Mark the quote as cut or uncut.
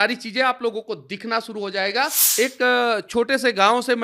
cut